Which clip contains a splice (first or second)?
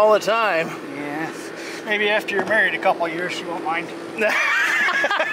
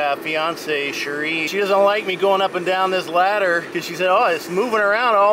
second